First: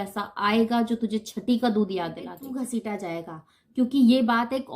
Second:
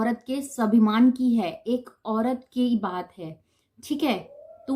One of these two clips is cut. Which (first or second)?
first